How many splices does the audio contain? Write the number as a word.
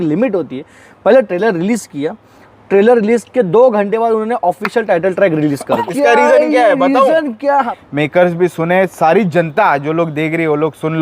two